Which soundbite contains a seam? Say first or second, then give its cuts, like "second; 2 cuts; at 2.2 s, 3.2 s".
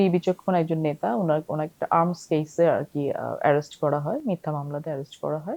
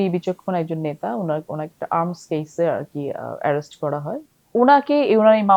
second; 1 cut; at 4.2 s